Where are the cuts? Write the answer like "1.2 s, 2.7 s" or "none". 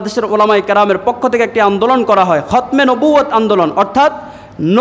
none